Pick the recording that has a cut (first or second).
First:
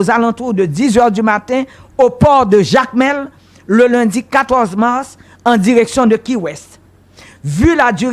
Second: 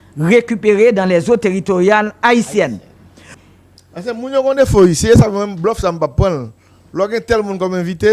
second